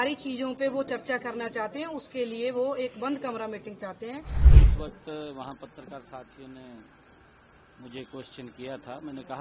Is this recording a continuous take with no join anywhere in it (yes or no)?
no